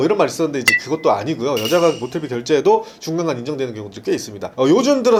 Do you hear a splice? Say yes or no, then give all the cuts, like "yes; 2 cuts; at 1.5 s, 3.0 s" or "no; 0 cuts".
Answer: no; 0 cuts